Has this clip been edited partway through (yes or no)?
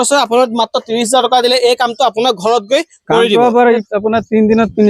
yes